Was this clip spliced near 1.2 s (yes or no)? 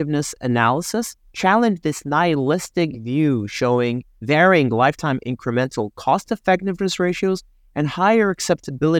yes